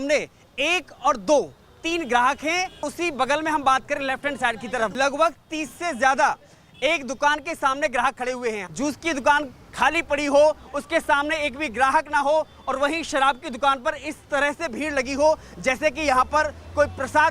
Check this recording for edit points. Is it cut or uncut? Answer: cut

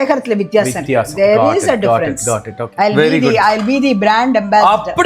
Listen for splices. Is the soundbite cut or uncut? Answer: cut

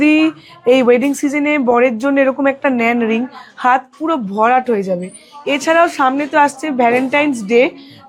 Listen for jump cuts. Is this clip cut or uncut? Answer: uncut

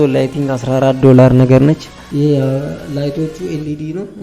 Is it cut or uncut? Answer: cut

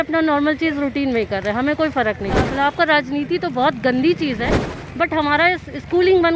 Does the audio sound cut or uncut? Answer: cut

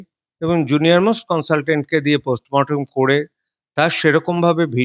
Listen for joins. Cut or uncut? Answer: uncut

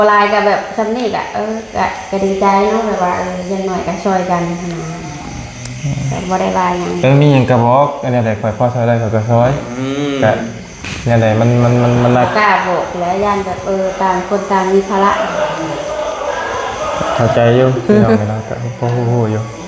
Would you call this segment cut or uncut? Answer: uncut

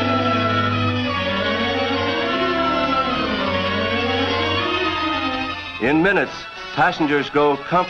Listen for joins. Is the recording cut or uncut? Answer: cut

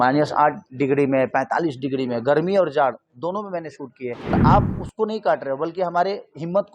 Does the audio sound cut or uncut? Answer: cut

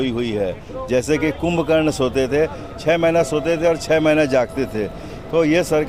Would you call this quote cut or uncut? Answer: uncut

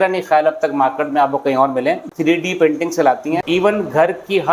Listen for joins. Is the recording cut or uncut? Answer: cut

